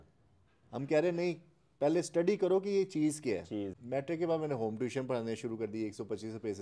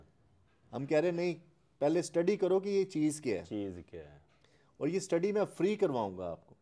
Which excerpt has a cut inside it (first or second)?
first